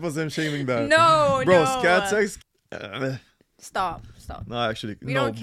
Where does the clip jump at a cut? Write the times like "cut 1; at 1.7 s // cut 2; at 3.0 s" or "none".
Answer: cut 1; at 2.4 s